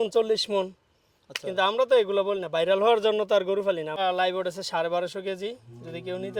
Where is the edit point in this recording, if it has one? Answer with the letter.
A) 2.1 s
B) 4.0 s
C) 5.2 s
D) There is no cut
B